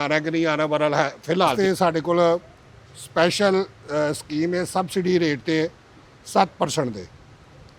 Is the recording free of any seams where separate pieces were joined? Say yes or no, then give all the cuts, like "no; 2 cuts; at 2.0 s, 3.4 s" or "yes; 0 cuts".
no; 1 cut; at 1.5 s